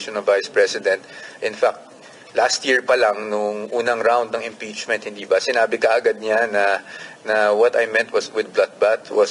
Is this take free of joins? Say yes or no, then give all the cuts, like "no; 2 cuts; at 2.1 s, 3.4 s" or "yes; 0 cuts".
yes; 0 cuts